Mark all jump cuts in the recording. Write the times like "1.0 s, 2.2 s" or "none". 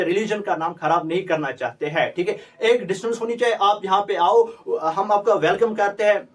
none